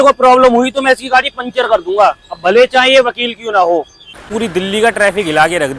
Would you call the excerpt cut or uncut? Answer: cut